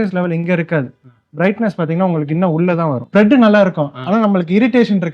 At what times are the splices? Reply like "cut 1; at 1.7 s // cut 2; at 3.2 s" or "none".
cut 1; at 3.1 s